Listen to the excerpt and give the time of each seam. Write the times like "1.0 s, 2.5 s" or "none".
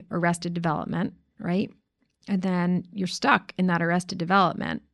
none